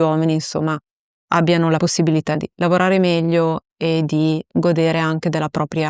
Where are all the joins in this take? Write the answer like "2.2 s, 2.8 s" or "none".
2.1 s